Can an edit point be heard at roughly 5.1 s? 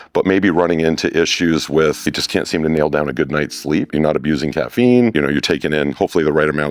yes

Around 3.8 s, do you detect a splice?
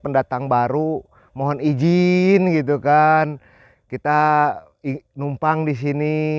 no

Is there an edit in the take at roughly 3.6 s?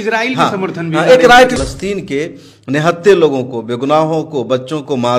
no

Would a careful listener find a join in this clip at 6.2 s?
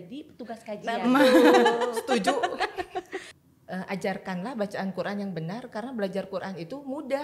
no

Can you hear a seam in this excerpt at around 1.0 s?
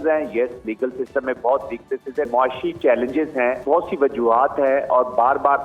no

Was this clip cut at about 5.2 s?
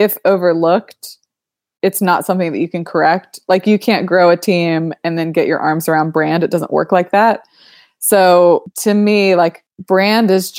no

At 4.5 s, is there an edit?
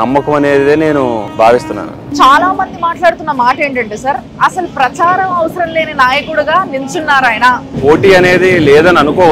no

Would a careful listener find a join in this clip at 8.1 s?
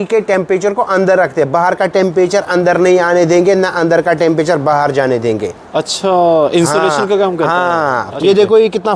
yes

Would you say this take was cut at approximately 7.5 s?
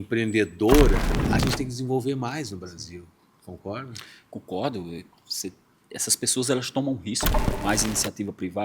yes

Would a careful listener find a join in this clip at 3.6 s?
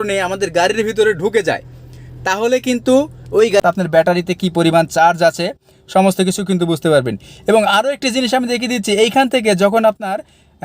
yes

